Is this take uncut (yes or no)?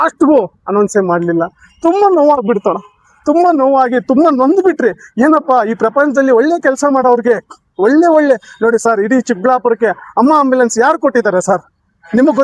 yes